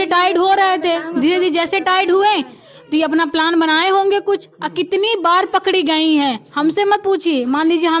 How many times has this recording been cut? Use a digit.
0